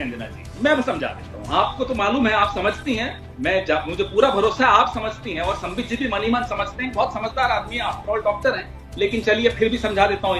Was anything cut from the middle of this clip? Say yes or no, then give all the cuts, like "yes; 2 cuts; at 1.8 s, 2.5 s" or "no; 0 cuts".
no; 0 cuts